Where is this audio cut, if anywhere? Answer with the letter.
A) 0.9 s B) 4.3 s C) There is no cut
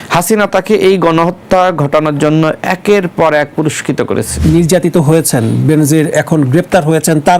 B